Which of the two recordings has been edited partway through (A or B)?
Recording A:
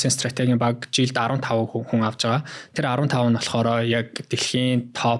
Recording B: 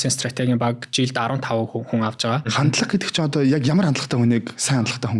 B